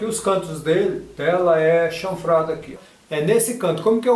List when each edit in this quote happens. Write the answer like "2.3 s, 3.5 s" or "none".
none